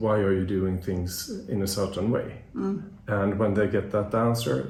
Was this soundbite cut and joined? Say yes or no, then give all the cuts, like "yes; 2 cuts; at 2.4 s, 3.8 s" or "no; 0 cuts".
no; 0 cuts